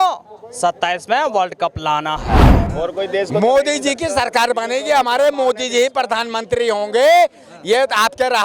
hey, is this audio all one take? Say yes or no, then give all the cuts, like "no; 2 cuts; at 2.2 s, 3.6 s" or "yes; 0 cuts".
no; 1 cut; at 2.6 s